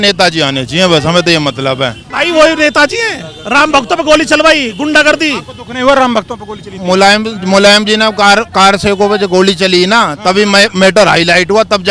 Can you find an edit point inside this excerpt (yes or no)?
yes